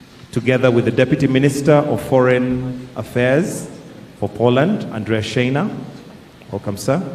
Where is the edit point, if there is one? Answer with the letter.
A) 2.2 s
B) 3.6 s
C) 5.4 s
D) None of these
A